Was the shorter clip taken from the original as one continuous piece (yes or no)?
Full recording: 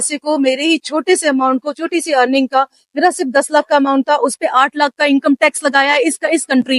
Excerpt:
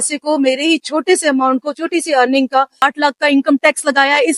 no